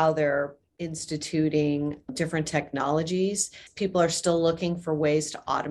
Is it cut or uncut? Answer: cut